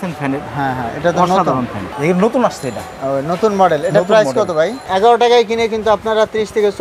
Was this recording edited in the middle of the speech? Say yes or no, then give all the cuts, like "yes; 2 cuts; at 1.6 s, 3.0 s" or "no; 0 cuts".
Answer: yes; 2 cuts; at 1.8 s, 4.8 s